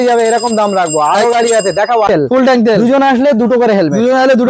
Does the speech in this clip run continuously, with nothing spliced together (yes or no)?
no